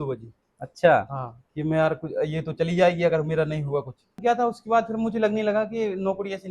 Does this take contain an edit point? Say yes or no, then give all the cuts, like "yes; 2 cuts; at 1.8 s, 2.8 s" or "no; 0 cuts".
yes; 1 cut; at 4.2 s